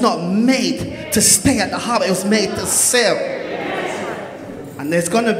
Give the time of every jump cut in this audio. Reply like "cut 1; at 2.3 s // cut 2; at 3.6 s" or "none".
none